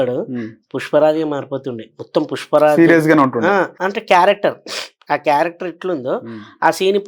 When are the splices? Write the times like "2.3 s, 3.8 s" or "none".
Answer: 3.8 s